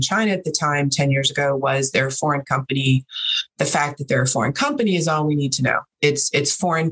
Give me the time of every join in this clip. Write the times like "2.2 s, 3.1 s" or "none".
none